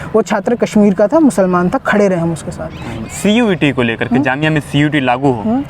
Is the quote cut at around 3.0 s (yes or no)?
yes